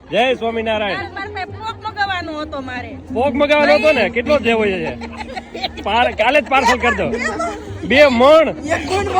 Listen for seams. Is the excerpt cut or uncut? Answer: uncut